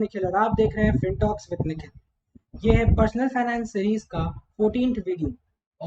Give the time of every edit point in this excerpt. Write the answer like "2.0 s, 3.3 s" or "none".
none